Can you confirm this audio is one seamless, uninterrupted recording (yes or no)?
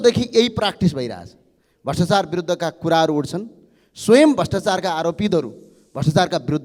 yes